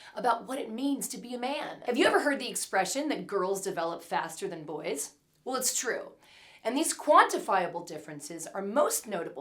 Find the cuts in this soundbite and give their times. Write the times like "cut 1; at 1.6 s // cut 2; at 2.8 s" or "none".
cut 1; at 1.8 s